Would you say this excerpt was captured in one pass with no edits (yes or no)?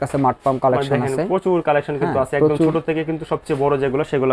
yes